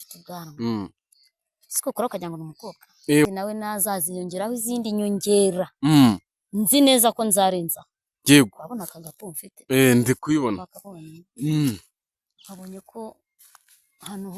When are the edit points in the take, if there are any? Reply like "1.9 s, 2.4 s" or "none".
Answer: 3.3 s

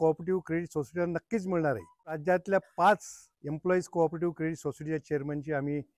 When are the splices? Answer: 2.2 s

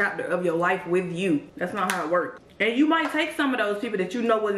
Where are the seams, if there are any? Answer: 2.4 s

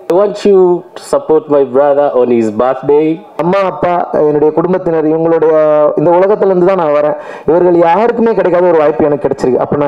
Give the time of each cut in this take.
3.3 s

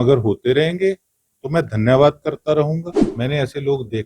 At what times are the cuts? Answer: 3.0 s

